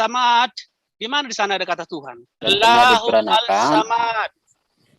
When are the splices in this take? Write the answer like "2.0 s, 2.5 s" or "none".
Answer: 2.5 s